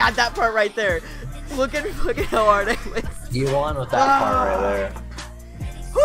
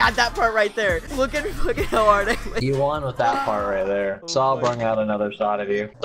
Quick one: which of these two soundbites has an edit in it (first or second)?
second